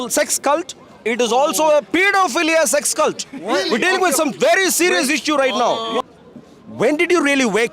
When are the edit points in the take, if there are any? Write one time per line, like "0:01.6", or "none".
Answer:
0:06.0